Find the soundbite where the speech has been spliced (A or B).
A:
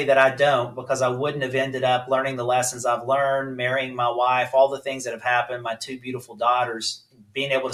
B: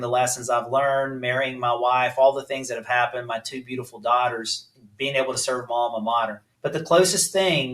B